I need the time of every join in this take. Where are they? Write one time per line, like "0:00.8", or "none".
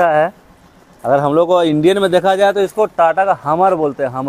none

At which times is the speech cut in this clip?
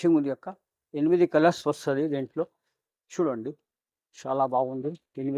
none

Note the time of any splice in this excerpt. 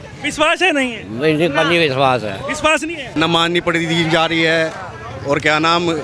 0:03.1

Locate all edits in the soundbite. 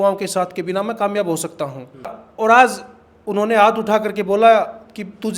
0:02.2

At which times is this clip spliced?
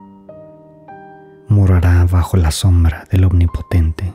0:01.1

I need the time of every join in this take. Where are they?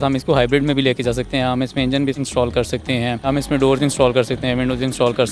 0:02.2
0:03.3

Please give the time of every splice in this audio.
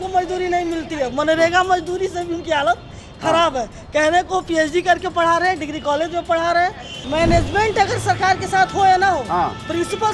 0:07.0

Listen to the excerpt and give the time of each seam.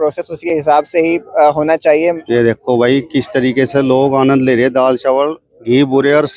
0:02.2

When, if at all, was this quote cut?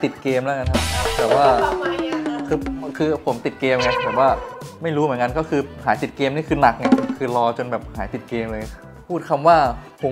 0:08.7

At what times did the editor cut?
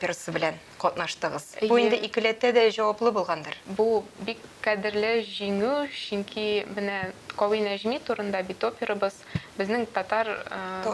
0:03.6

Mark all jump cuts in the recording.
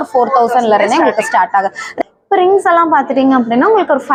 none

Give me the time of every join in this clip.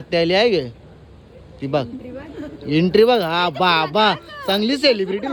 none

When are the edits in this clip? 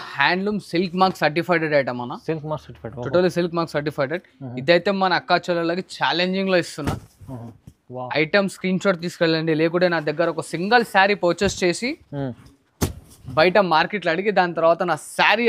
none

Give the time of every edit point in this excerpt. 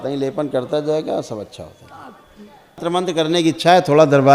0:02.8

